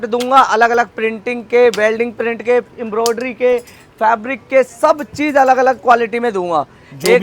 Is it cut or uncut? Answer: uncut